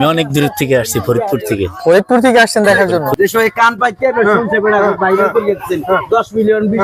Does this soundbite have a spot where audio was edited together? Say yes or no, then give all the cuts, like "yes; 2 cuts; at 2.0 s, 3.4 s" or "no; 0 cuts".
yes; 1 cut; at 3.1 s